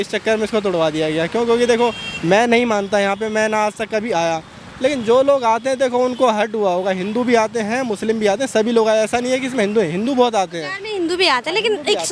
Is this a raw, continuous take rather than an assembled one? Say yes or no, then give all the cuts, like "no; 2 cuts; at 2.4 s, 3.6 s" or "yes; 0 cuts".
yes; 0 cuts